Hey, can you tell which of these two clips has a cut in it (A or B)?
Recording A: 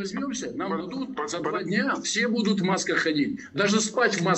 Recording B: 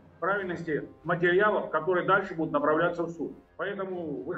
B